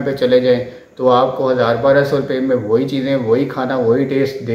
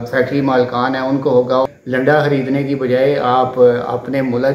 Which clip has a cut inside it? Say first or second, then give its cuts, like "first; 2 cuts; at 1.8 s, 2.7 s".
second; 1 cut; at 1.7 s